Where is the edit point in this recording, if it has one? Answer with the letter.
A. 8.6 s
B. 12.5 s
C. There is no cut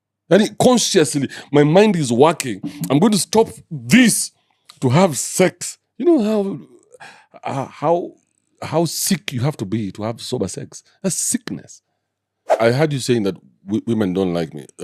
B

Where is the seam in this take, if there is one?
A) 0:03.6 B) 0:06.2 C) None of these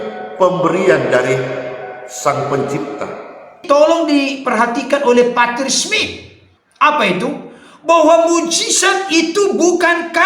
A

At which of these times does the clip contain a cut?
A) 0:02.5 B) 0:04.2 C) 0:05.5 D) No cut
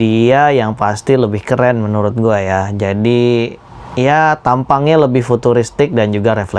D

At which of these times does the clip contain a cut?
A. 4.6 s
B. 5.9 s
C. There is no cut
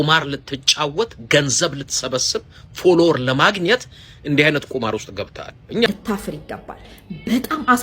B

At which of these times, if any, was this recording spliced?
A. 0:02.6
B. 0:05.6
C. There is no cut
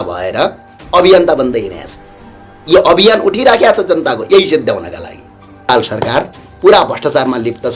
B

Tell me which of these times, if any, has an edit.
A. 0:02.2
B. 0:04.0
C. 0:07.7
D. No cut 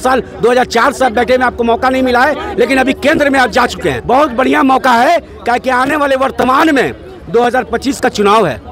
B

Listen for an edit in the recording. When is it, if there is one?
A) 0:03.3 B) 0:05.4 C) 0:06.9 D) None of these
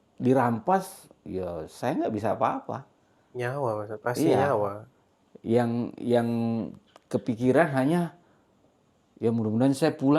D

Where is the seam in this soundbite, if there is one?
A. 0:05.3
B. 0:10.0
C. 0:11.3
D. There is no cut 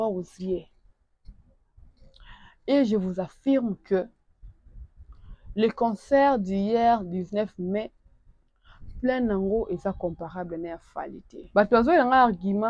C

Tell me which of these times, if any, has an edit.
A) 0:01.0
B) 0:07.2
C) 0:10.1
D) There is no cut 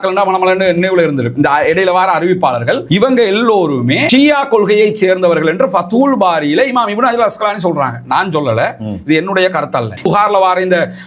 C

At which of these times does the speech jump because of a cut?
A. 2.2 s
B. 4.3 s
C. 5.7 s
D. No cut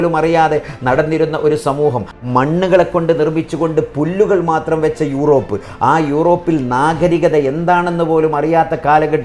A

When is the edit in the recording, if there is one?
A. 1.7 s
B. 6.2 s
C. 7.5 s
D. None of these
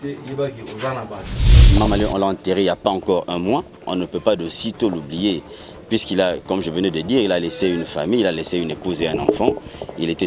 A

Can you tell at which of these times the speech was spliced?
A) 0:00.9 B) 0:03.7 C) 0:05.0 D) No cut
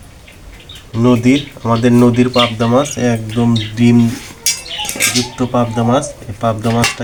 D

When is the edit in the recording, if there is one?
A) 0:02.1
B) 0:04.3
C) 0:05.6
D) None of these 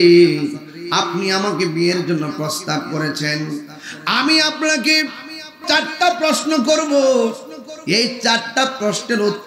C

